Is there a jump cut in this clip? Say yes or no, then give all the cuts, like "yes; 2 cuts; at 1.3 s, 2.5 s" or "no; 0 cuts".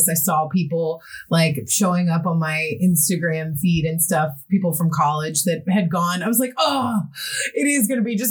no; 0 cuts